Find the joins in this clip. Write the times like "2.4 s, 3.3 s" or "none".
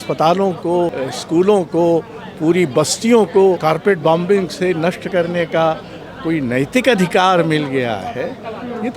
1.1 s, 3.6 s